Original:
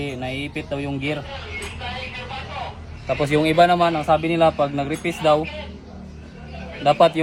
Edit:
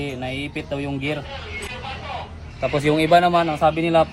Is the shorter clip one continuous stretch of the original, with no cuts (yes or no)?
no